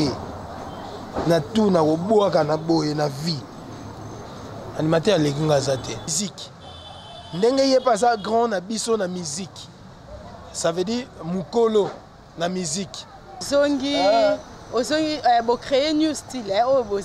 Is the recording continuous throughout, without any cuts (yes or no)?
no